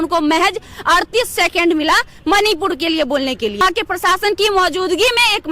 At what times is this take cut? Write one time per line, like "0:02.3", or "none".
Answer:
0:03.6